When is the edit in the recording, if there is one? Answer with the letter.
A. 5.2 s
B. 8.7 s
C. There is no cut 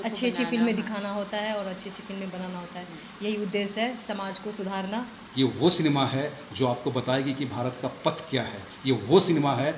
A